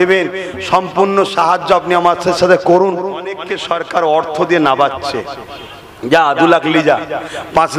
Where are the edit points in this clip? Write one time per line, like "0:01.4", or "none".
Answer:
0:03.5